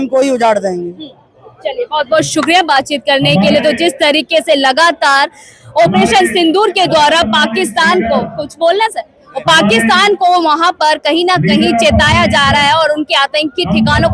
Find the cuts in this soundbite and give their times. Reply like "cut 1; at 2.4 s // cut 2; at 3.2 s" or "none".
none

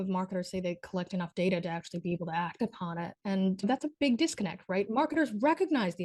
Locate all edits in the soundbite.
cut 1; at 3.6 s

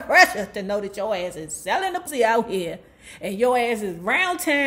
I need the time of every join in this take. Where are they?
cut 1; at 2.0 s

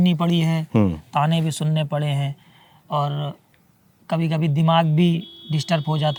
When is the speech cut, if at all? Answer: none

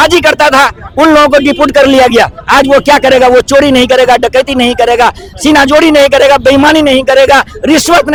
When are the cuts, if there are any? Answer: none

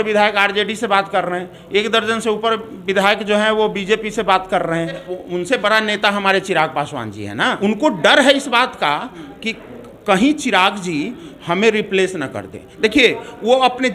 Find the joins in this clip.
cut 1; at 5.1 s // cut 2; at 7.6 s

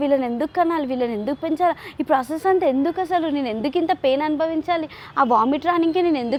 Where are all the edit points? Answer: none

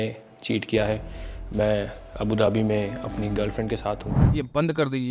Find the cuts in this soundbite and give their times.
cut 1; at 4.2 s

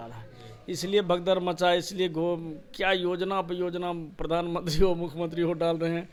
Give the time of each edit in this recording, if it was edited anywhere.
none

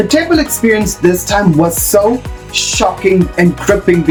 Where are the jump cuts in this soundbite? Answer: none

